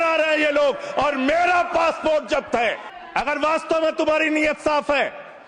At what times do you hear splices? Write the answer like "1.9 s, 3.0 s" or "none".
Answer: 2.9 s